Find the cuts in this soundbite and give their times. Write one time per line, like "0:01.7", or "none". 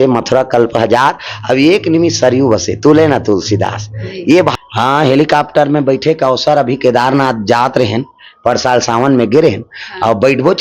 0:04.5